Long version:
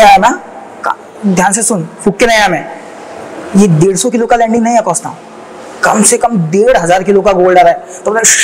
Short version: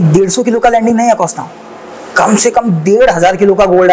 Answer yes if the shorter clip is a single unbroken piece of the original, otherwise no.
yes